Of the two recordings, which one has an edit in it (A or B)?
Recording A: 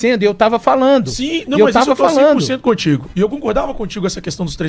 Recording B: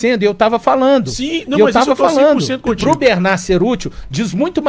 B